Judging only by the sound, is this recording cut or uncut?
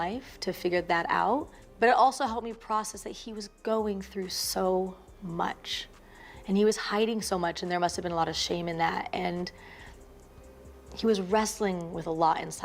uncut